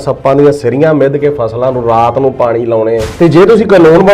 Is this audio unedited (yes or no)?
no